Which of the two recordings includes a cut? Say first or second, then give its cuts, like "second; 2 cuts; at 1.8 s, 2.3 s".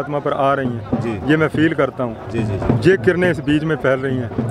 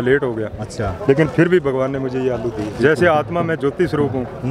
second; 1 cut; at 2.7 s